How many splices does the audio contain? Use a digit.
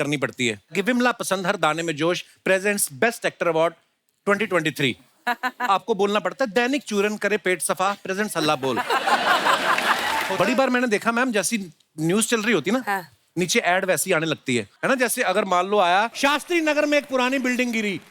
1